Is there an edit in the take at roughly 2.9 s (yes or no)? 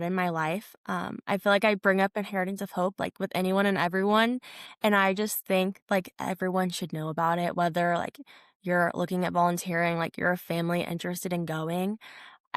no